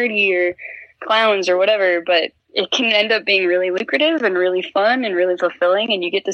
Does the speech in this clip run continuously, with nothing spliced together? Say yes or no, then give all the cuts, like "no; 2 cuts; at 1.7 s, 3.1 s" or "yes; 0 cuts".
no; 1 cut; at 2.4 s